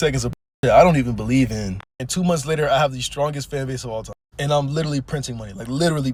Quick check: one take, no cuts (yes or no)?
yes